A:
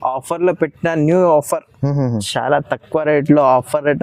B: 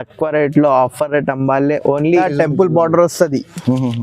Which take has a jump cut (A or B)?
B